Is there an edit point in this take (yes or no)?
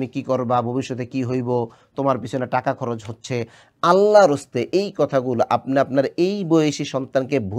no